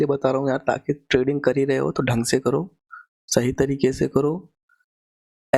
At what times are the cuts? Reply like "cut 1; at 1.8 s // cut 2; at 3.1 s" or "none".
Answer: none